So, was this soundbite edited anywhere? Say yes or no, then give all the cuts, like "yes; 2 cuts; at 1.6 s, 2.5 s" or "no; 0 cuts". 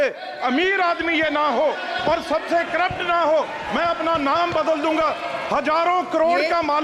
no; 0 cuts